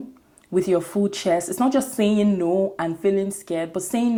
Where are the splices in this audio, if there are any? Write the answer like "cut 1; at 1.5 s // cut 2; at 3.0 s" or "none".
none